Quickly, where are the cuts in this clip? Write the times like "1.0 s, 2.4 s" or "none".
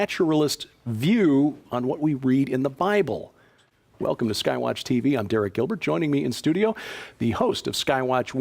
6.3 s